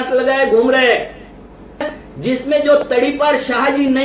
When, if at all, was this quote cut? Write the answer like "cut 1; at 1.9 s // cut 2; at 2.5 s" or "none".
cut 1; at 1.9 s